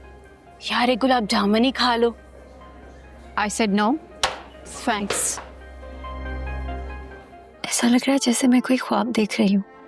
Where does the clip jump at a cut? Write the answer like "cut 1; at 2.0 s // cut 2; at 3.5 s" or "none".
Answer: cut 1; at 7.4 s